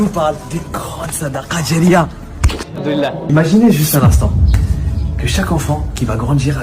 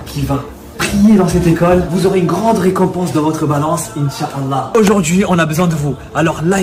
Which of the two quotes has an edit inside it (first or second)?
first